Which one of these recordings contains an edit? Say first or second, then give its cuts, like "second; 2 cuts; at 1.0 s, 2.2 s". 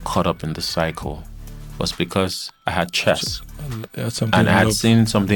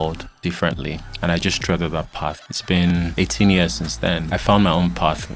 second; 3 cuts; at 1.1 s, 2.8 s, 4.2 s